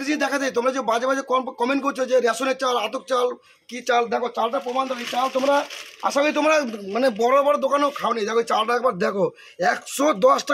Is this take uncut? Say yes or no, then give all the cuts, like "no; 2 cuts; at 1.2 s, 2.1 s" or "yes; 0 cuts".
yes; 0 cuts